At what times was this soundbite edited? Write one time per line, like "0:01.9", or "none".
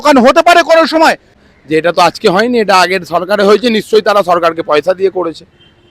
0:01.4

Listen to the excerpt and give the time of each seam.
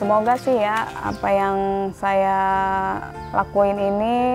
0:01.0
0:03.1

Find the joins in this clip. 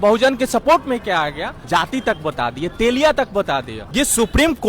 0:01.5
0:03.8

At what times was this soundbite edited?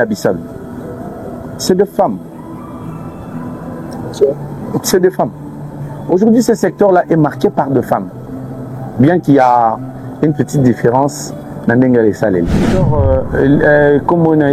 0:12.7

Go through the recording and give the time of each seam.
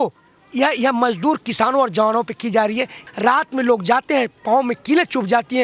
0:03.0

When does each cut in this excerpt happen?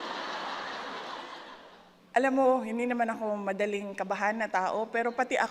0:01.6

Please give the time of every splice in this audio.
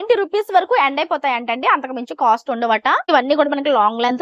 0:03.1

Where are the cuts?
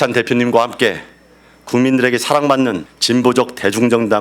0:02.9

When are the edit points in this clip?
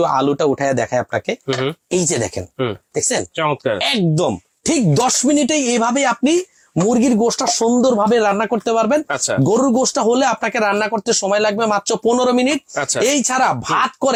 none

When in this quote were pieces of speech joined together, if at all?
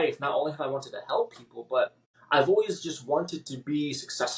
0:02.1

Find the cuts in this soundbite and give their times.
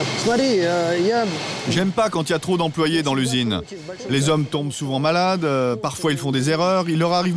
none

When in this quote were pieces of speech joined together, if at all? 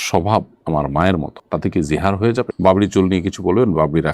0:02.5

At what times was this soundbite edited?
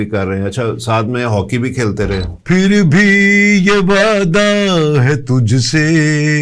0:02.3

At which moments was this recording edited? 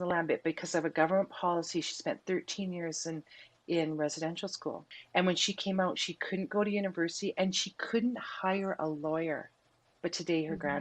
0:04.9

